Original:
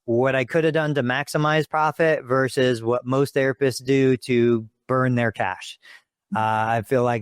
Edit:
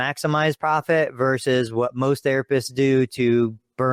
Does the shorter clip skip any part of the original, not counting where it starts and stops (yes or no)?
no